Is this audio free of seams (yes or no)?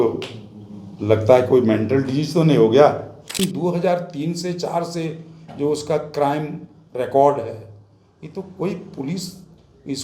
no